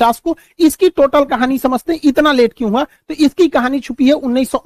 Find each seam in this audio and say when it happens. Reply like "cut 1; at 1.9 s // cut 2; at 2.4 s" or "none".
none

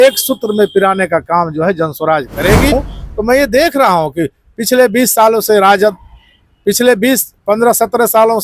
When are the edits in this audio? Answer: cut 1; at 2.7 s

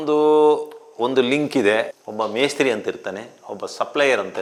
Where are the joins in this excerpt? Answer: none

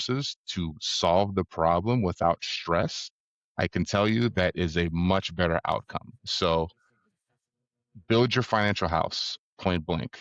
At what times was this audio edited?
none

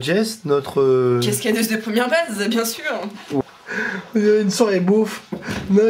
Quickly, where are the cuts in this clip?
cut 1; at 3.4 s

